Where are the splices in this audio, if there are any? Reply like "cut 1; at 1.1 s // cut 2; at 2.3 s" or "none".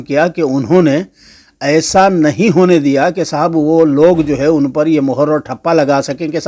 none